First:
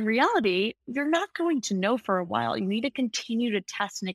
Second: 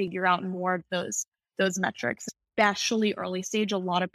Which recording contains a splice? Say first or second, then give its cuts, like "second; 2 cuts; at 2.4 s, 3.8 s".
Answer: second; 1 cut; at 2.2 s